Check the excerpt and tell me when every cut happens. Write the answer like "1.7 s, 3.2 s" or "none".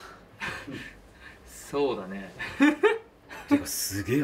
3.3 s